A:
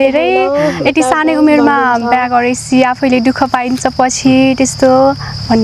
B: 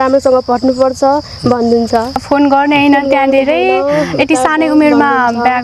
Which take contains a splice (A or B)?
B